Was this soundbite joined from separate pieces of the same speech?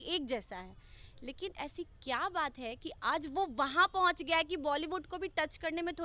no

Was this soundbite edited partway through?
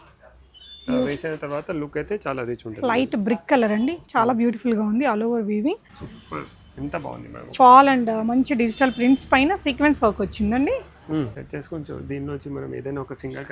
yes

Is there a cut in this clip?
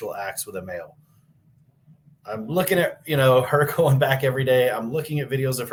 no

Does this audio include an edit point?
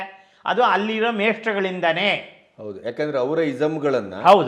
no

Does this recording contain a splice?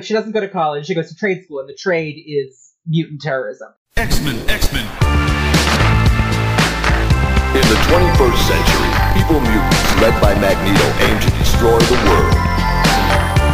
yes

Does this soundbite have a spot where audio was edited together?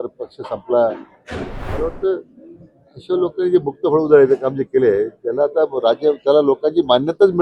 yes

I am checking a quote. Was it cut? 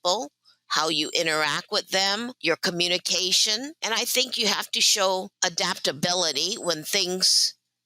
yes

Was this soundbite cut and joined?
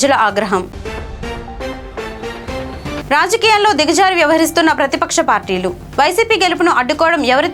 no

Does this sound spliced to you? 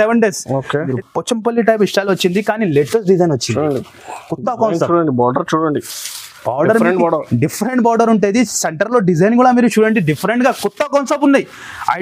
yes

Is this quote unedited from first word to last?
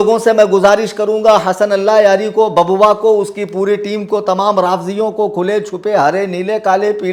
yes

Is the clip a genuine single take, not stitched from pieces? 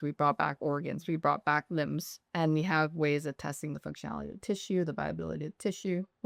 yes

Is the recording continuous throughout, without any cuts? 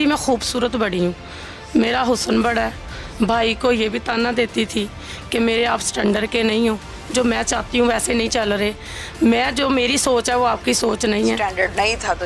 yes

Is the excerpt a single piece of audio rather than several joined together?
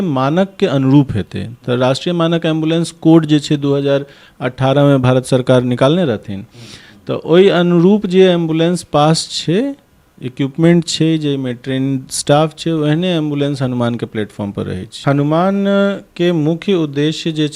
no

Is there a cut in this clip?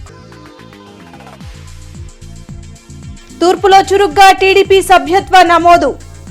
no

